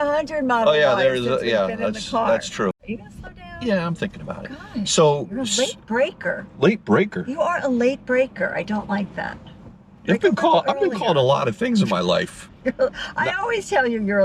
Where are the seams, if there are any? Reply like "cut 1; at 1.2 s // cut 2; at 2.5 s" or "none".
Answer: cut 1; at 2.8 s